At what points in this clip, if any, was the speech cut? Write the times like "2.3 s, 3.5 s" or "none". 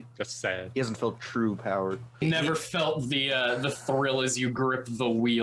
2.2 s